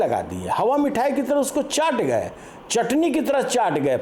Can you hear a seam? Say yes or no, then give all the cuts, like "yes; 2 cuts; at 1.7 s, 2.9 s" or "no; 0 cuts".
no; 0 cuts